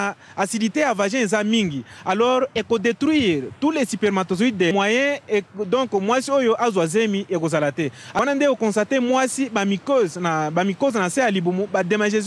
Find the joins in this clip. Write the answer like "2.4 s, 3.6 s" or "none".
4.7 s, 8.2 s